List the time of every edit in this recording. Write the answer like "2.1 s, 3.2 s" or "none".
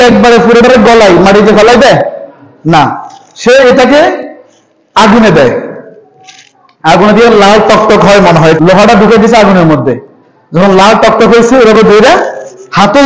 8.6 s